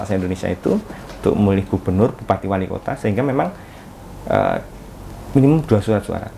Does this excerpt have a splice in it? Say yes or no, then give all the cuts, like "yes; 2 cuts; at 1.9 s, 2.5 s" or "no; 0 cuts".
no; 0 cuts